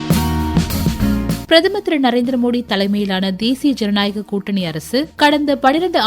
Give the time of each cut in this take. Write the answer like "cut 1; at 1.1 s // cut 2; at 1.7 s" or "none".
cut 1; at 1.1 s